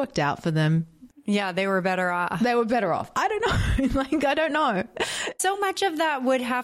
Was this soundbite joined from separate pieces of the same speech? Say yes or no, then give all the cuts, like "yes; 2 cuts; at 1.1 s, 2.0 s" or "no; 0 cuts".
no; 0 cuts